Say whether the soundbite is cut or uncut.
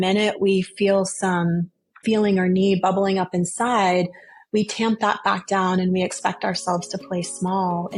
uncut